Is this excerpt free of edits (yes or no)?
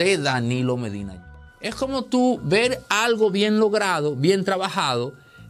no